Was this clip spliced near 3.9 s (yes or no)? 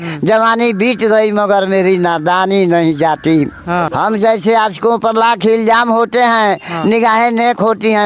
yes